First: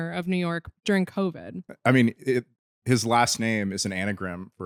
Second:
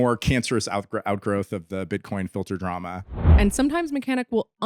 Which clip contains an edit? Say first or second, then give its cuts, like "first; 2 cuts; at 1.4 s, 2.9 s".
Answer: second; 1 cut; at 3.2 s